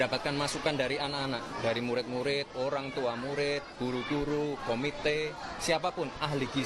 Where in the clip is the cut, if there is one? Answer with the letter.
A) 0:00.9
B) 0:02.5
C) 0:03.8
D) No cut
D